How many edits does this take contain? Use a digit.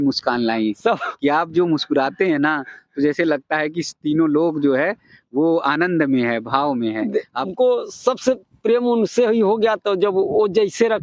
1